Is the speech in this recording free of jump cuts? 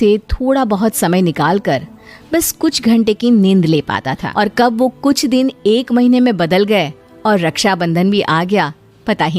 no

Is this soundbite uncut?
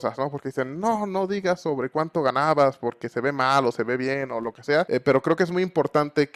no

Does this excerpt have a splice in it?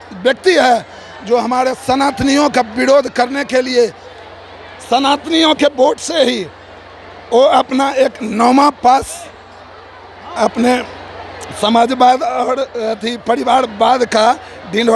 no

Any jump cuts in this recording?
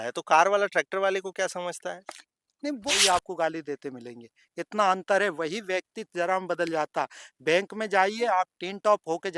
yes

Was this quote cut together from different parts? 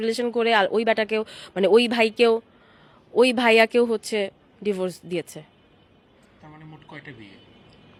no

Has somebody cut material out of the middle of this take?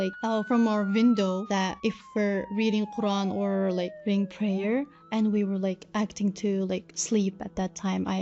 no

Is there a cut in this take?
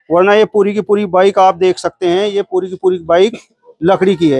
no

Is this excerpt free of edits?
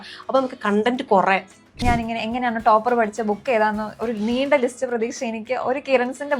no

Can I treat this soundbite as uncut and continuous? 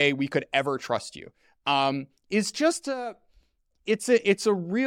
yes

